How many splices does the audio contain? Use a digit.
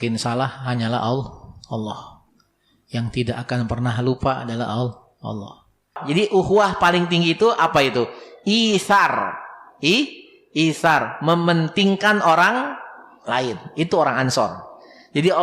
1